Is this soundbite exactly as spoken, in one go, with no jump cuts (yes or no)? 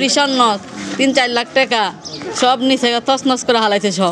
yes